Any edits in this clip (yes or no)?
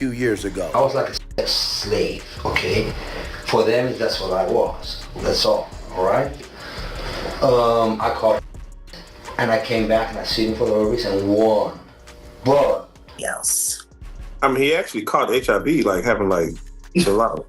yes